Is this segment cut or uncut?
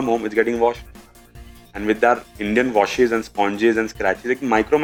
uncut